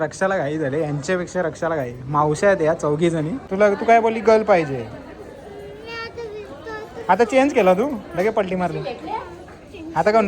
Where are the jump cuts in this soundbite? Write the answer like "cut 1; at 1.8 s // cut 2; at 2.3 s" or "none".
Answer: cut 1; at 3.4 s